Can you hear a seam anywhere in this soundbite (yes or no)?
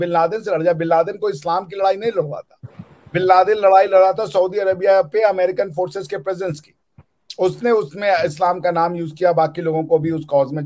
no